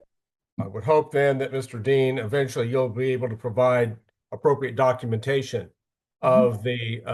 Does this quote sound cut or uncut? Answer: uncut